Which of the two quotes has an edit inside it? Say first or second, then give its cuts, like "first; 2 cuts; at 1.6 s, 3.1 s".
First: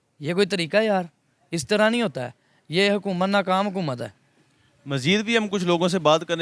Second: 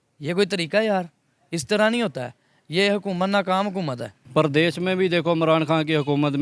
second; 1 cut; at 4.1 s